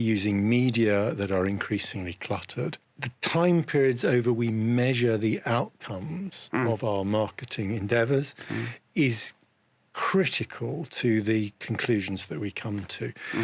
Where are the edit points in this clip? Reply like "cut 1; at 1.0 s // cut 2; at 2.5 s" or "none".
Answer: cut 1; at 2.9 s